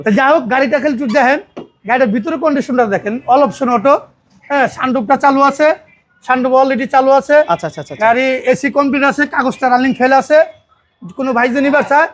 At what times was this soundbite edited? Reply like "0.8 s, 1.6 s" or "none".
none